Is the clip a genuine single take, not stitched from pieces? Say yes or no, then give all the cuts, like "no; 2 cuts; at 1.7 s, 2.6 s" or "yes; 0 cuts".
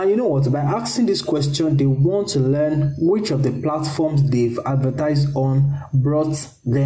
yes; 0 cuts